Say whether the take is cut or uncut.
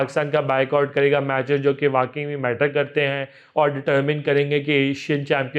uncut